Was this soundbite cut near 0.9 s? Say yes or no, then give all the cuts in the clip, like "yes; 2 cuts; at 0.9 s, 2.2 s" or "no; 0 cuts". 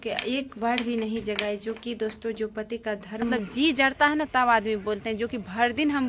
no; 1 cut; at 3.3 s